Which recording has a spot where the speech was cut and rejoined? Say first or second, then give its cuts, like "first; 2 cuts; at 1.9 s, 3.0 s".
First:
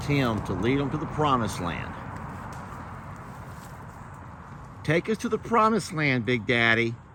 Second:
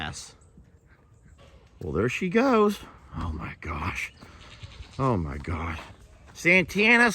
second; 1 cut; at 1.4 s